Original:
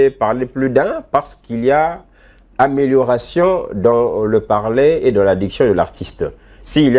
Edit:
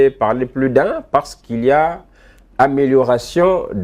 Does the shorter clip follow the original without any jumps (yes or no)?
yes